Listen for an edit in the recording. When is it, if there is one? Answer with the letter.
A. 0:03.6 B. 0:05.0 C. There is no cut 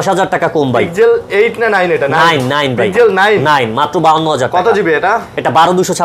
C